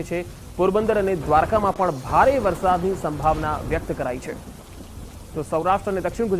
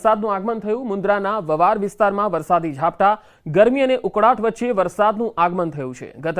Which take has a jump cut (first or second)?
second